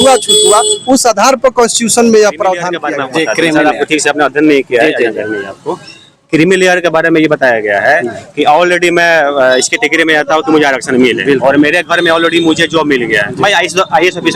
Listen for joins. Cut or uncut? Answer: cut